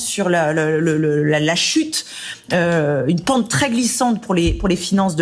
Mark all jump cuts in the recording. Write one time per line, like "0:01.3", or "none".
none